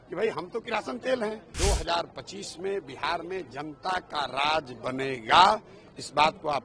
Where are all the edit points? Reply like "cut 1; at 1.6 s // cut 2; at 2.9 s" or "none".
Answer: cut 1; at 1.5 s